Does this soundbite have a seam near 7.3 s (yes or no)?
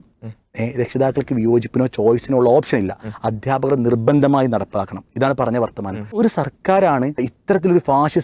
yes